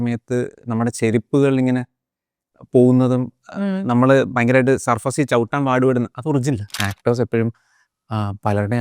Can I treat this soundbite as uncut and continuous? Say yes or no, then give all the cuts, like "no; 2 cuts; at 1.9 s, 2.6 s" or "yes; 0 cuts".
no; 1 cut; at 6.9 s